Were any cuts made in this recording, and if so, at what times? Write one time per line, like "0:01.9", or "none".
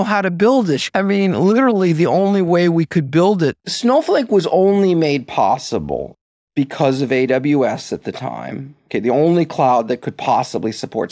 0:00.9
0:03.6

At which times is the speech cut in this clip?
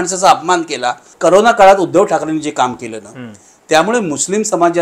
0:01.1

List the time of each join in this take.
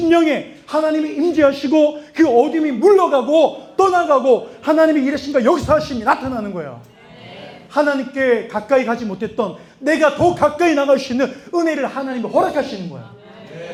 none

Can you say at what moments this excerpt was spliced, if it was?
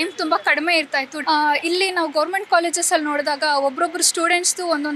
0:01.1

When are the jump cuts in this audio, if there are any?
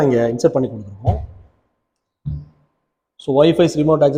none

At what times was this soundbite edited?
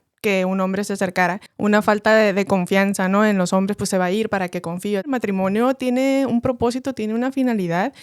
0:01.5
0:05.1

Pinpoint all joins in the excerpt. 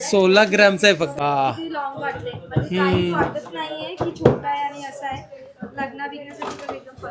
0:01.1

